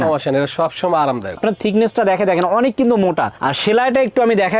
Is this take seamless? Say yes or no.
no